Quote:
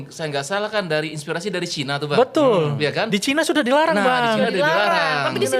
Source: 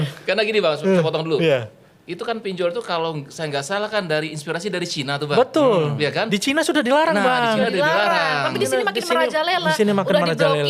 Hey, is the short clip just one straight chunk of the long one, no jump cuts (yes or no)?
yes